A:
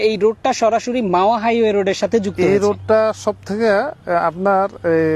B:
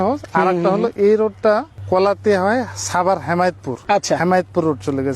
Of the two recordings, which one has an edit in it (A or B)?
B